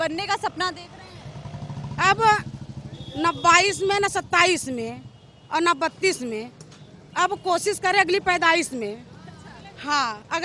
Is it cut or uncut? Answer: uncut